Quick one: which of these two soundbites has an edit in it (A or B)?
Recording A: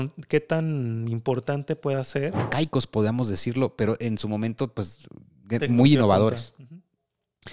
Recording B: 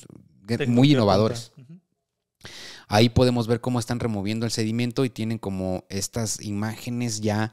A